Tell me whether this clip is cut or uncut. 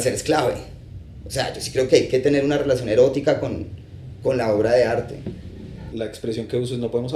cut